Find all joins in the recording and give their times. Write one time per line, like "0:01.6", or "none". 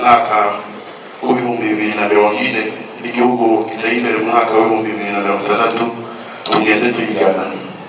none